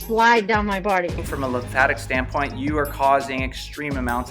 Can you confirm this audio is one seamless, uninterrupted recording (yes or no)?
no